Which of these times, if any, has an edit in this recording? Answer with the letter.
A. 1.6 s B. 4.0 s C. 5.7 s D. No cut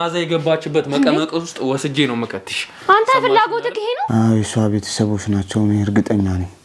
B